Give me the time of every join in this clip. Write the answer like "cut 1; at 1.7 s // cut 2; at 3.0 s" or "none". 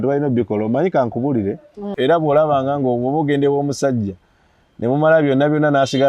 cut 1; at 2.0 s